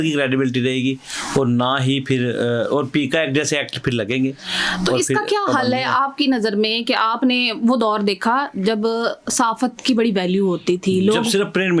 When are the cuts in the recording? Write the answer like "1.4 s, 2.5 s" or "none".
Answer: none